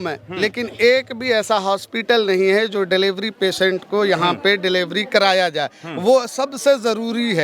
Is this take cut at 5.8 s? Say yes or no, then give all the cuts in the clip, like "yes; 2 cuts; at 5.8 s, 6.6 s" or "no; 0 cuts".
no; 0 cuts